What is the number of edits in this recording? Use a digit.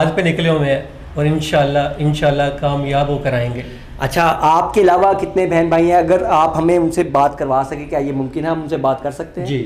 0